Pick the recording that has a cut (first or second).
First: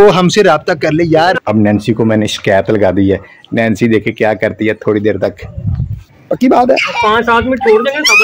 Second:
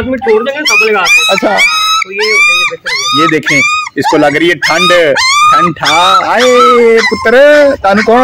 first